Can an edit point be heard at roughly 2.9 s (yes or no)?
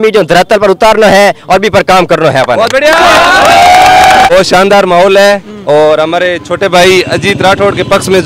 no